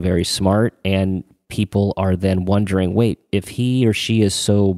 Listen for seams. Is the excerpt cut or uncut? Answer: uncut